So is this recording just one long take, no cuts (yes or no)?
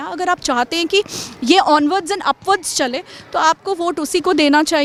yes